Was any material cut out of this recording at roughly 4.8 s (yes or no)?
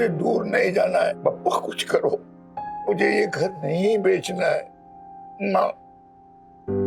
no